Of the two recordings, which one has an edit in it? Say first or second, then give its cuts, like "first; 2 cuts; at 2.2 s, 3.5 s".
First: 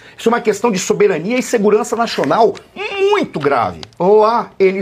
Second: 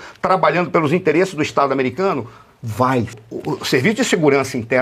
second; 1 cut; at 3.1 s